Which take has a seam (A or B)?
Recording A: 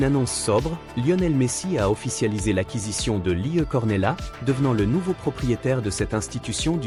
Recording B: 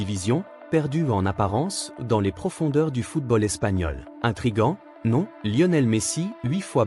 B